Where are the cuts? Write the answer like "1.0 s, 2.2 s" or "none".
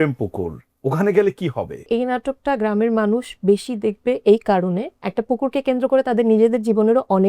1.8 s, 5.0 s